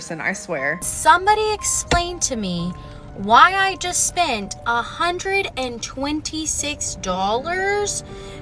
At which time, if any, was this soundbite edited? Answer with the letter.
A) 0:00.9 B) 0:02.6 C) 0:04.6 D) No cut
A